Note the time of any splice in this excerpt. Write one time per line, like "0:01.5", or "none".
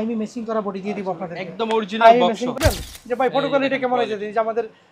0:02.5